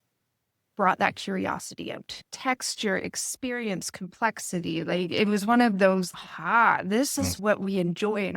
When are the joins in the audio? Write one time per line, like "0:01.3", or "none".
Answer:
0:02.0
0:07.4